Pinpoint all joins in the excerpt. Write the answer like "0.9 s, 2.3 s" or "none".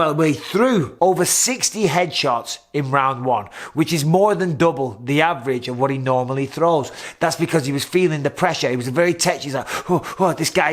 0.9 s